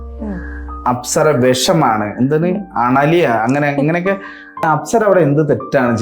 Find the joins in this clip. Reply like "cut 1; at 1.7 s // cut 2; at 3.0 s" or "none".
cut 1; at 4.6 s

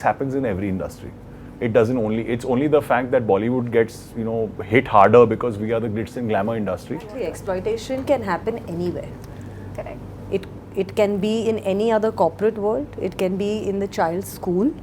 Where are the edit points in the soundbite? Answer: cut 1; at 7.1 s

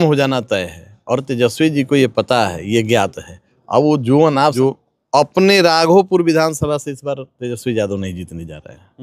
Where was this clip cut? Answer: cut 1; at 4.5 s

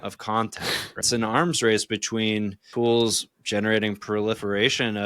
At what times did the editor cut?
cut 1; at 1.0 s // cut 2; at 2.6 s

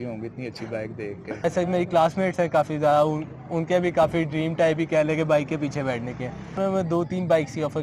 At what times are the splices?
cut 1; at 1.4 s // cut 2; at 6.6 s

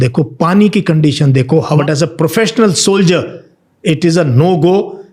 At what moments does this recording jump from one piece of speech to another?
cut 1; at 1.8 s

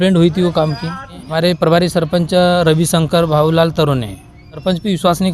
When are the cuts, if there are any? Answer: cut 1; at 1.2 s // cut 2; at 4.6 s

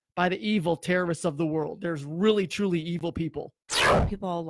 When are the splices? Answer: none

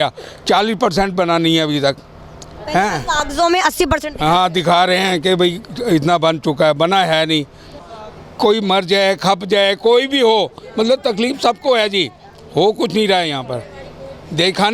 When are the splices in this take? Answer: cut 1; at 7.7 s

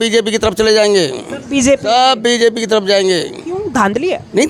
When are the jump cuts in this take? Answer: none

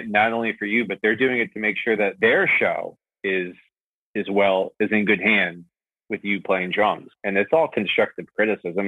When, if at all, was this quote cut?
cut 1; at 2.1 s // cut 2; at 7.1 s

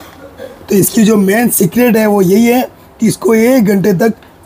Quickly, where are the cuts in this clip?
none

